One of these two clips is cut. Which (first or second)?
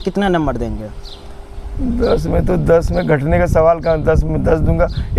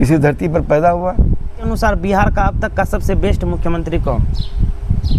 second